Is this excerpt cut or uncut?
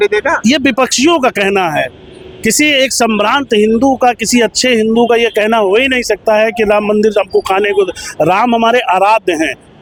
uncut